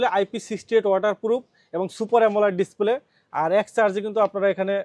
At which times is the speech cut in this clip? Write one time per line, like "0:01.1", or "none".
none